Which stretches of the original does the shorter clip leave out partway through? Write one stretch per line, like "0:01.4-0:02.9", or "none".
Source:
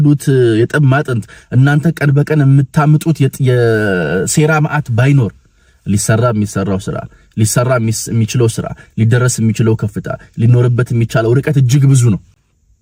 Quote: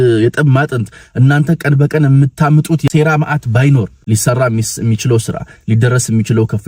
0:03.2-0:04.3
0:05.4-0:07.2